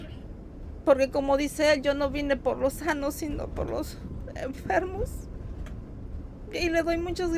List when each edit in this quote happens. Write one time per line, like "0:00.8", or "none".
0:06.1